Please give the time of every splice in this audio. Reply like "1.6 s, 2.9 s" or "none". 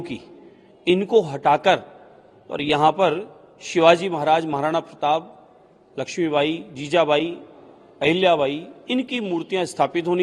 none